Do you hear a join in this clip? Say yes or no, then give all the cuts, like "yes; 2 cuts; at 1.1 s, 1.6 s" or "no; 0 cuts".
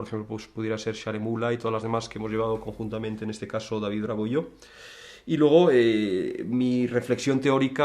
yes; 1 cut; at 6.0 s